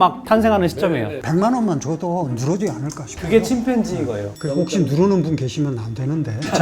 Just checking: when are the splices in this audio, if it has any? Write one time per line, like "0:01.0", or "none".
0:01.2